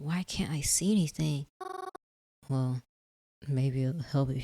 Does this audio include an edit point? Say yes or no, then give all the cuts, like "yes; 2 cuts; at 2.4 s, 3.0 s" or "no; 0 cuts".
yes; 1 cut; at 2.0 s